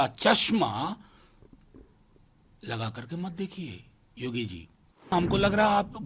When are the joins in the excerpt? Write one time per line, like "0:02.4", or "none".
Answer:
0:05.1